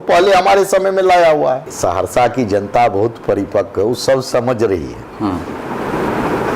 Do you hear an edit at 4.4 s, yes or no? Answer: no